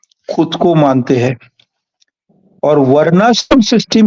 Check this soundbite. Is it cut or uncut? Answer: uncut